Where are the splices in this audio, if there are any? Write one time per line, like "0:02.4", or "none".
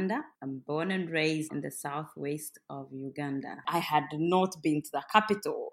0:01.5
0:03.6